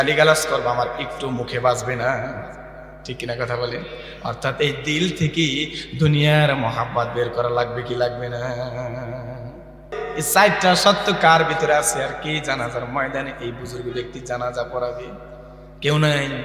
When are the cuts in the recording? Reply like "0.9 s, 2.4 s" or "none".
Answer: 9.9 s